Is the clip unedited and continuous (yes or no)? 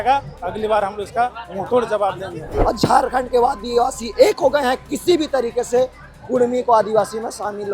no